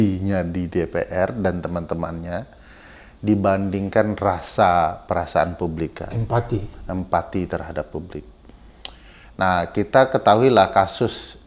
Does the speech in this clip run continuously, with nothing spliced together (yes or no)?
yes